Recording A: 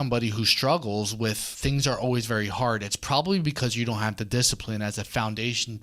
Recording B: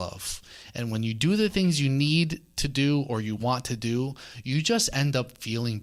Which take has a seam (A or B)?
A